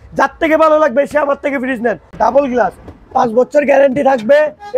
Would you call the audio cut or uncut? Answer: cut